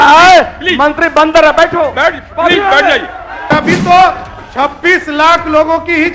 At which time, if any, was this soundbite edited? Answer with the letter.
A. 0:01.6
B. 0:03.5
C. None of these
B